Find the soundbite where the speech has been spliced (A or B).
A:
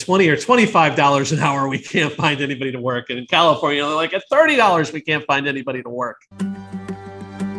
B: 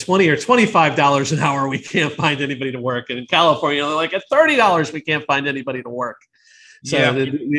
A